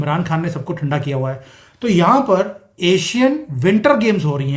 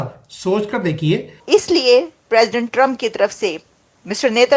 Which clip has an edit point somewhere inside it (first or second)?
second